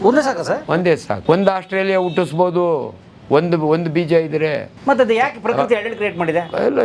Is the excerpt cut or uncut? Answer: cut